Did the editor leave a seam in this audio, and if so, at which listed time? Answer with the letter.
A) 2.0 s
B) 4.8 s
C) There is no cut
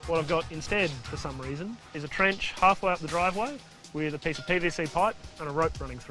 A